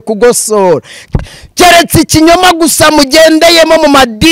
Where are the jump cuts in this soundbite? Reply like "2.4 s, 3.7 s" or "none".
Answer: 0.9 s